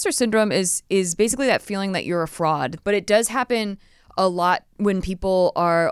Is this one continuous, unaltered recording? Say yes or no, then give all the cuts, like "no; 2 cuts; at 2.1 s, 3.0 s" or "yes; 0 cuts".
no; 1 cut; at 2.7 s